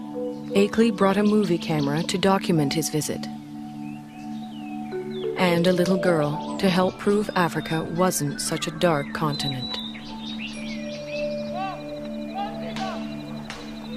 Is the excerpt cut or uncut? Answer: uncut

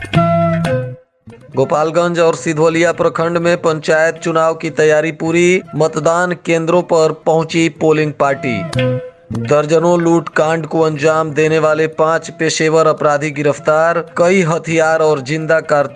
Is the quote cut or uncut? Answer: cut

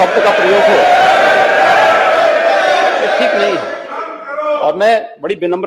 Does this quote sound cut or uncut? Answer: uncut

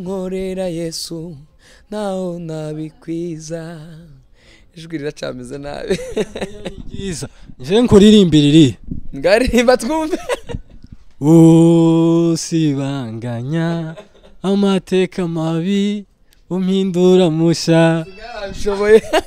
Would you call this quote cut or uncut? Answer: uncut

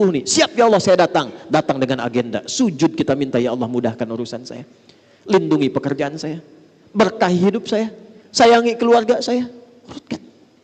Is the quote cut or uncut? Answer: uncut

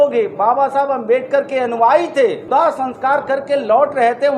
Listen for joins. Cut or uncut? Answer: cut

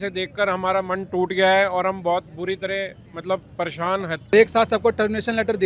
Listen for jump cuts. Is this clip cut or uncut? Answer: cut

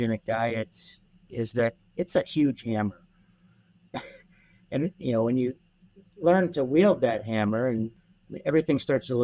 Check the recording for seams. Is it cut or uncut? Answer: cut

